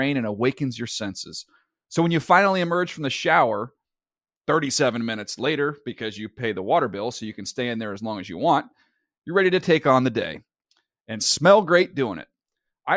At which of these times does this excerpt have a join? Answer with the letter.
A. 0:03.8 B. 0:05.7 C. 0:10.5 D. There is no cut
D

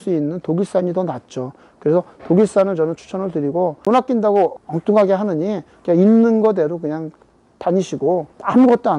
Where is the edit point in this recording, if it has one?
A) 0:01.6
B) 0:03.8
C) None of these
B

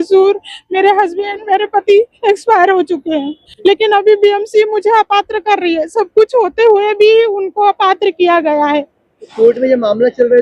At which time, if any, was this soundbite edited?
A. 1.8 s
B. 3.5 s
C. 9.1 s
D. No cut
B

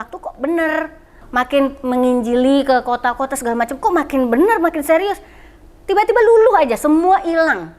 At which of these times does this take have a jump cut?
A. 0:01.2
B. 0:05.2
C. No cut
A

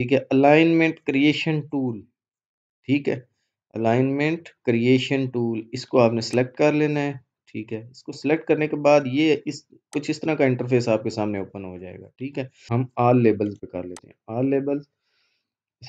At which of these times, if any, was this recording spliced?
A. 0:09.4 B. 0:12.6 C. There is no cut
B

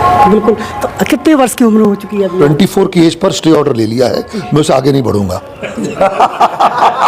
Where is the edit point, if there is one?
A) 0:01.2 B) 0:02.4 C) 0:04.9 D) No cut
B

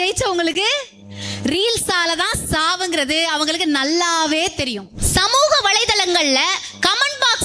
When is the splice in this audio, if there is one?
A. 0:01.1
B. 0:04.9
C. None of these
B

